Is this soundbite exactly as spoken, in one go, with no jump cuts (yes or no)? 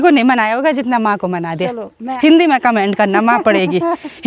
no